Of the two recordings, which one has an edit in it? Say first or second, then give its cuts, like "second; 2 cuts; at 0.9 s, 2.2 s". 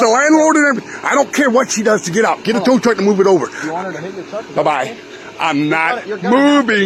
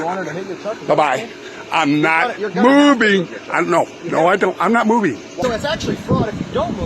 second; 1 cut; at 5.4 s